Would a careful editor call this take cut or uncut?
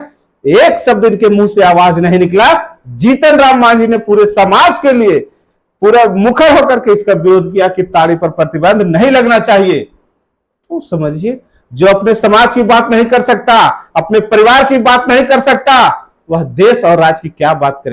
uncut